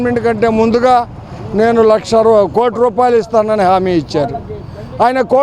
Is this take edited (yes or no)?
no